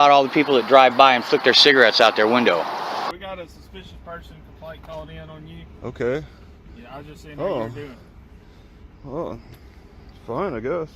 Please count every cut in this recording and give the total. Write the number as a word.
one